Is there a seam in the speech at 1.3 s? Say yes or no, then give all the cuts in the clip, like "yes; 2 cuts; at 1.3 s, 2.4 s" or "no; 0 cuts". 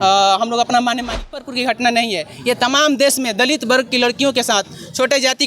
yes; 1 cut; at 1.3 s